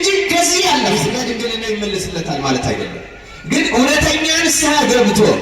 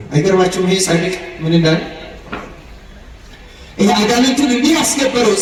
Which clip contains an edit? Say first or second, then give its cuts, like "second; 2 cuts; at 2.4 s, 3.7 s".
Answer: first; 1 cut; at 0.9 s